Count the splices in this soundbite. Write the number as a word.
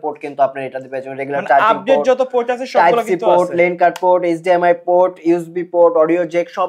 zero